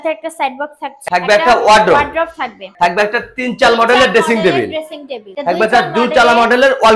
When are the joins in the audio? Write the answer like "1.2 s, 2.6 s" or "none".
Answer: 1.0 s, 2.6 s, 5.3 s